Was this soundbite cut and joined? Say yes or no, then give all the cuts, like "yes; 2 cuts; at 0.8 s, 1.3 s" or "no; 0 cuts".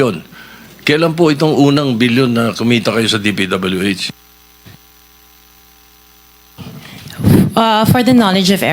no; 0 cuts